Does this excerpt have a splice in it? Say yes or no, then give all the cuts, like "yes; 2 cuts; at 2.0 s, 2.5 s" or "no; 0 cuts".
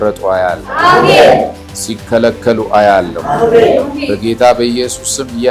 no; 0 cuts